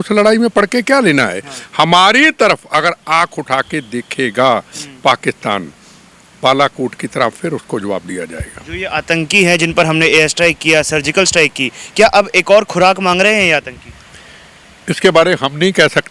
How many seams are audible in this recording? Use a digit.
0